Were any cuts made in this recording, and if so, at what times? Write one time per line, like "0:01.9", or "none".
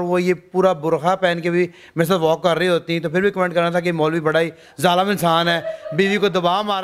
none

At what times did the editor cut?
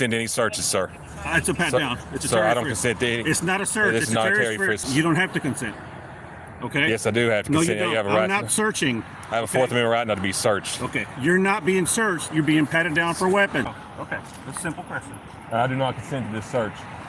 0:04.8
0:13.7

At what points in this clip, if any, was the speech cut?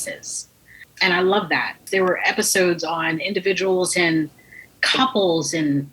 0:00.9
0:01.8

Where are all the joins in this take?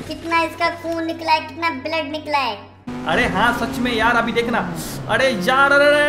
0:03.0

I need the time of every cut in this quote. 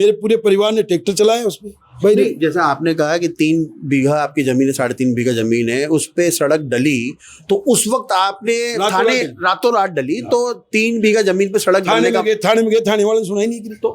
none

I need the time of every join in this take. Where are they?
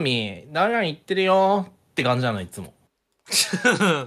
none

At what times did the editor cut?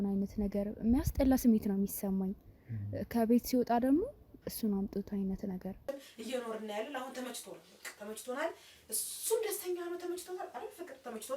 0:05.8

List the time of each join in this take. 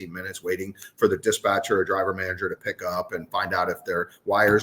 none

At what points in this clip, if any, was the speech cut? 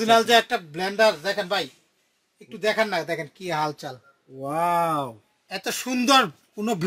0:01.2

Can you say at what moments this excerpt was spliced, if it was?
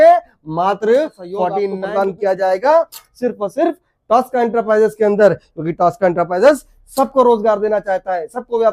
0:01.8

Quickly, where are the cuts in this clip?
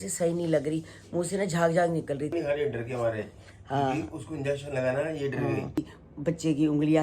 0:02.3
0:05.9

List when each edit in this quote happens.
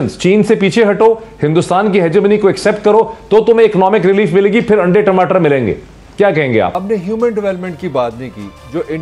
0:06.3

